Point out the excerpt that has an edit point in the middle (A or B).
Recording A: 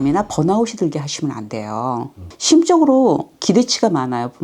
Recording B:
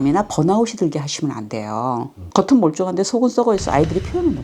B